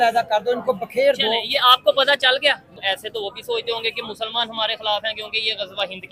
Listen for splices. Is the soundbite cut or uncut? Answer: cut